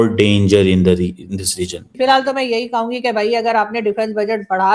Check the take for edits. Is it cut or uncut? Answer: cut